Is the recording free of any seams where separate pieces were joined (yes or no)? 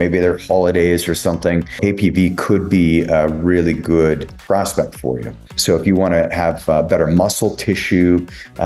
no